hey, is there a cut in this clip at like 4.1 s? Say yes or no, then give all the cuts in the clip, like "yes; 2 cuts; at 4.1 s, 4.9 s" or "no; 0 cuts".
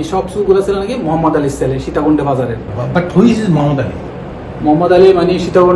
no; 1 cut; at 2.7 s